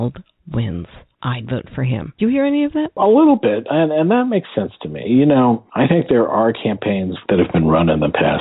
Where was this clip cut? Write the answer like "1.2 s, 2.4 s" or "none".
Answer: 1.0 s, 2.1 s, 3.0 s, 7.2 s